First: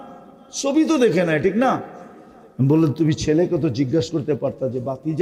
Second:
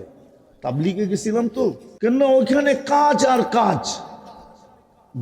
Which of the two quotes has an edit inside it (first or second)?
second